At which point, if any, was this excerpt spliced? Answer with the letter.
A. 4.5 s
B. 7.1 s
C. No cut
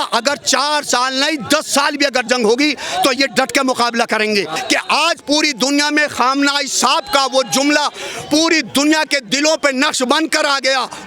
A